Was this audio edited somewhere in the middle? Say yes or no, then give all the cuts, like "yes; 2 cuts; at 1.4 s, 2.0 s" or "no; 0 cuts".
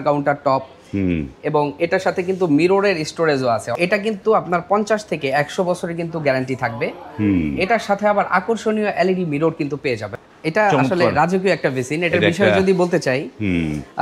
yes; 2 cuts; at 3.7 s, 10.1 s